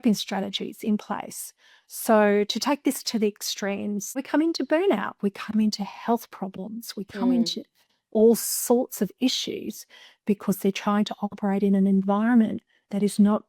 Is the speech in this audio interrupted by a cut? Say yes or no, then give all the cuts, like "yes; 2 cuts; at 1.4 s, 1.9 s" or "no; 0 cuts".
yes; 1 cut; at 4.2 s